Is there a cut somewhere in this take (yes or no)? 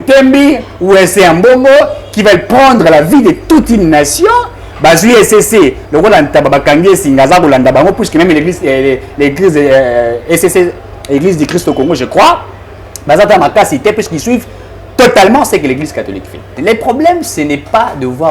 yes